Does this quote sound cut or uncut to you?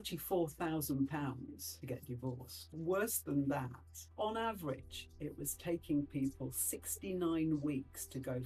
cut